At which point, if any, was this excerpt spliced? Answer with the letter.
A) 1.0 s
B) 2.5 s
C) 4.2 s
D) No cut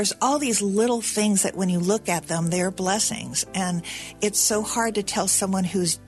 D